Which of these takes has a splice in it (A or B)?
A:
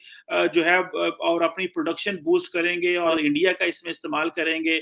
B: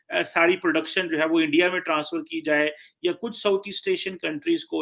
A